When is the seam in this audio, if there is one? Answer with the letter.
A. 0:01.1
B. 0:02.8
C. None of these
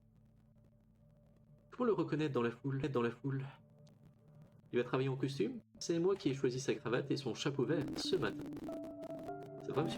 B